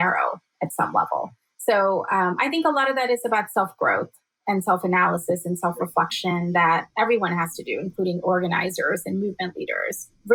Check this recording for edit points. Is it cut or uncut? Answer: uncut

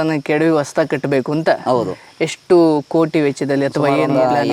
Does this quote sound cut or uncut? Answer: uncut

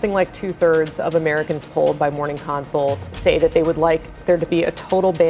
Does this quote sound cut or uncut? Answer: cut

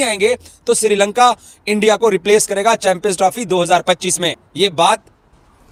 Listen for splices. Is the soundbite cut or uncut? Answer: uncut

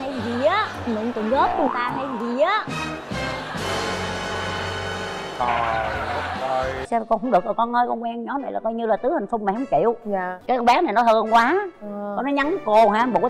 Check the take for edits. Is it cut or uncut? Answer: cut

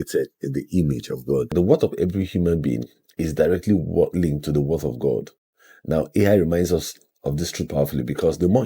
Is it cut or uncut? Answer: cut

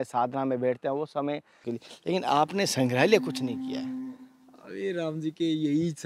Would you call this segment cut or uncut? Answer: cut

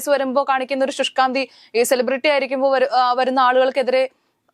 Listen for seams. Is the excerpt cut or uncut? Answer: uncut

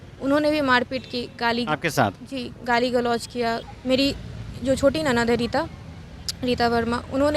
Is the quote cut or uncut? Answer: cut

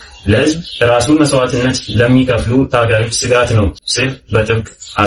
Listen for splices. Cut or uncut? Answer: cut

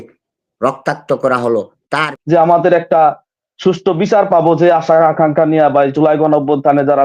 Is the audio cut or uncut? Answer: cut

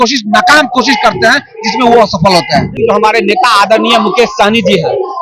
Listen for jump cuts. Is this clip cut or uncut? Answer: cut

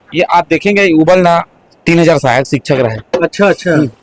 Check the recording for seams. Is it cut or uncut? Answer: uncut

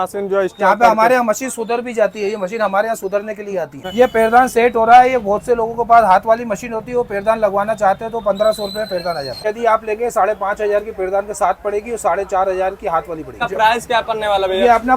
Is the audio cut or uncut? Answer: cut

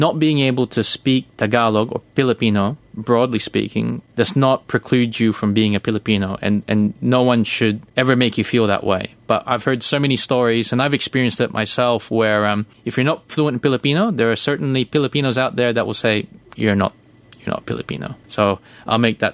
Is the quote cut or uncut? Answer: cut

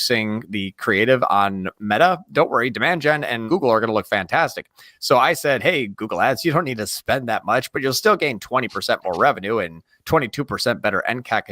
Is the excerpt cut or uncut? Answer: cut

